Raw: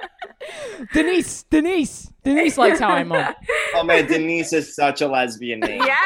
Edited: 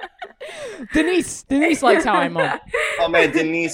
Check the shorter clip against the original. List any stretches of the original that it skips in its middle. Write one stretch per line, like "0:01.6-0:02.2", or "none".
0:01.4-0:02.1